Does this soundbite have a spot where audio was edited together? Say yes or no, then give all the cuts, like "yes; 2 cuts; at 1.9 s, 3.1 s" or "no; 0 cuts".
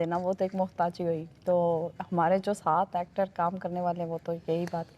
no; 0 cuts